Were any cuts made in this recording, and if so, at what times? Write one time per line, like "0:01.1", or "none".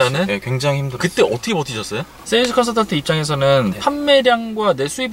0:02.1